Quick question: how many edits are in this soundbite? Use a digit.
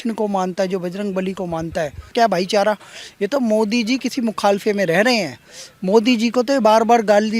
1